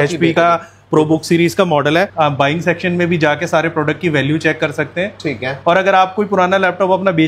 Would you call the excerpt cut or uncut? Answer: cut